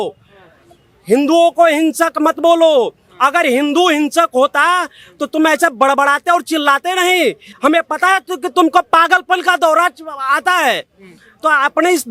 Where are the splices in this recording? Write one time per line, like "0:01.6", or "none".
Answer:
none